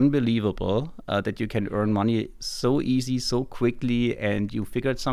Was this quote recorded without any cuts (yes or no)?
yes